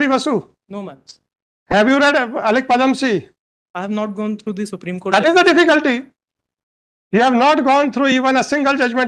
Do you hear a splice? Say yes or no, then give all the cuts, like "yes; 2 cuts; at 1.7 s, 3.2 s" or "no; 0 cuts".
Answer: no; 0 cuts